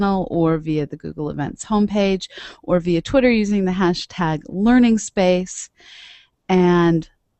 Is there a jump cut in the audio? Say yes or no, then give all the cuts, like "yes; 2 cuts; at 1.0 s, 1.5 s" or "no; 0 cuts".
no; 0 cuts